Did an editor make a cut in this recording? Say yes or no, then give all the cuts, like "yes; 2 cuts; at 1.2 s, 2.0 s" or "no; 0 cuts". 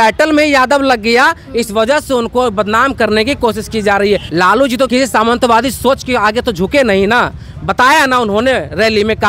yes; 1 cut; at 4.3 s